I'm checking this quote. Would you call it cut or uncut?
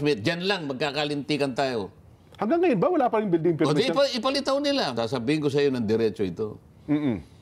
cut